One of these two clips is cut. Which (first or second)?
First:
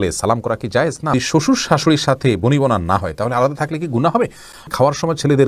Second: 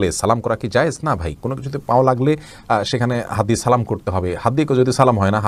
first